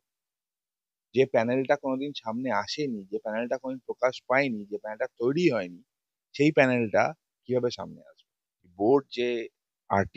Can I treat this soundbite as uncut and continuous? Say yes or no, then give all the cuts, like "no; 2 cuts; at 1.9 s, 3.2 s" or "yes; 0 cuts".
no; 1 cut; at 8.7 s